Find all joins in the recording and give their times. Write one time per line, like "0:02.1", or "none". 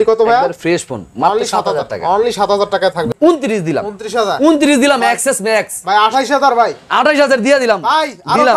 0:03.1